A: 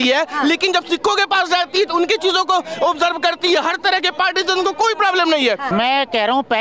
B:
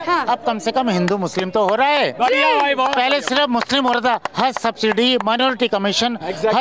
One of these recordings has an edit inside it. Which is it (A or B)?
A